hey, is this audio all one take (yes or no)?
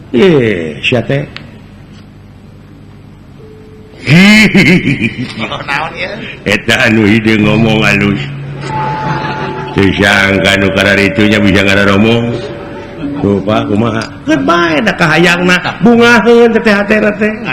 yes